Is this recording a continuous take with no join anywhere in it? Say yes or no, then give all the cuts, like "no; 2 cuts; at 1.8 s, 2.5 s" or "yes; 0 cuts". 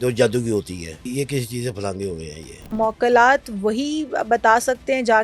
no; 2 cuts; at 1.1 s, 2.7 s